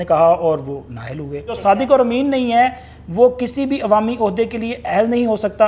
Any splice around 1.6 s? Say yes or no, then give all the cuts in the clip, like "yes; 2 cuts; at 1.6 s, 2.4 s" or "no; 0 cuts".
yes; 1 cut; at 1.6 s